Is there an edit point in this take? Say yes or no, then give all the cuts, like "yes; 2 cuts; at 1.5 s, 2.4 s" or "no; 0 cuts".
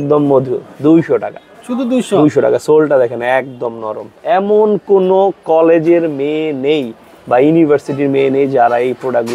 yes; 1 cut; at 4.1 s